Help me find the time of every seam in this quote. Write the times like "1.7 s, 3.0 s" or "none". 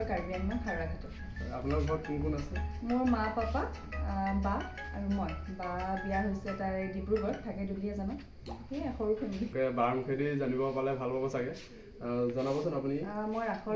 9.5 s